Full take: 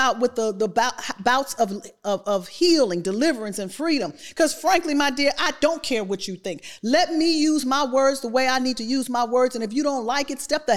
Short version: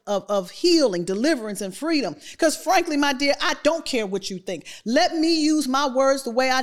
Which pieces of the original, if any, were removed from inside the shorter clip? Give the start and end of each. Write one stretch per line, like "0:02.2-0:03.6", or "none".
none

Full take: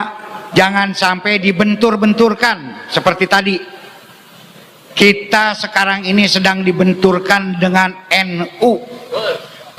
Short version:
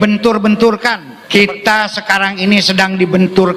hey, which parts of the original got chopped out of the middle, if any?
0:02.7-0:04.8

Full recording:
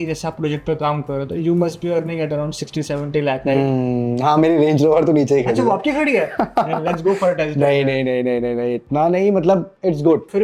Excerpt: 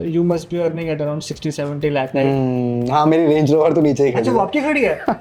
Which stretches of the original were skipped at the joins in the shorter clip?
none

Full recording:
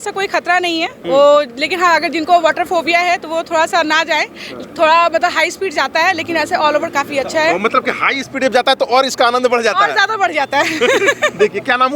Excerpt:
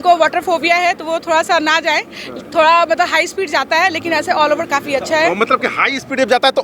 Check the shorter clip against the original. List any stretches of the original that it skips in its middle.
none

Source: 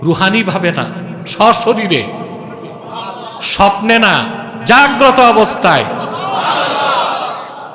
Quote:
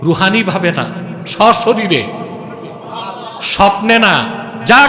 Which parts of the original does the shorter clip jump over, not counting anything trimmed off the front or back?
none

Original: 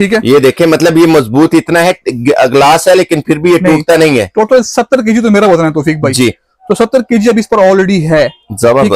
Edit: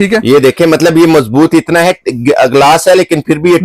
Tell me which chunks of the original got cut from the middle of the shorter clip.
none

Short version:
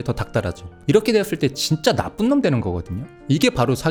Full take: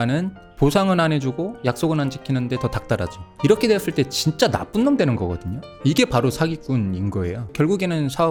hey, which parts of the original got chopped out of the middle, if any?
none

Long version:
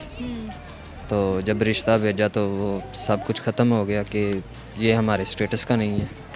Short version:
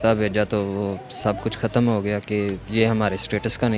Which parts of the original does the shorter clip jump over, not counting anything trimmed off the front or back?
0:04.5-0:04.7

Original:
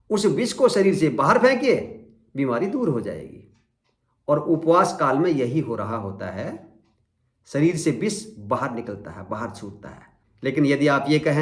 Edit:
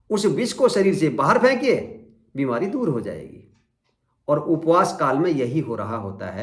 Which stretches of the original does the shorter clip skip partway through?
none

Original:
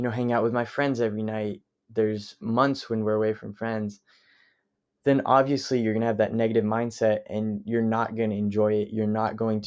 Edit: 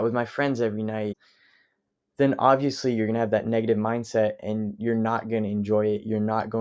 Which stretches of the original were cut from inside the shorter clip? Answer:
0:01.7-0:04.2

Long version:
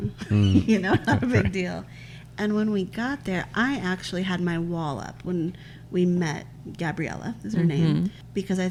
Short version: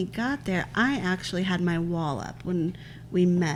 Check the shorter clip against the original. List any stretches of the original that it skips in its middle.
none

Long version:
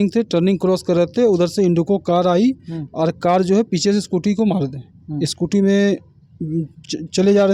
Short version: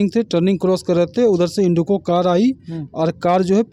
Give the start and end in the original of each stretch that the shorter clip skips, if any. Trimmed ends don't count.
none

